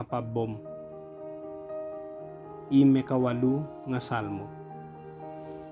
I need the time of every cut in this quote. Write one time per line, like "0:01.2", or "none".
0:04.5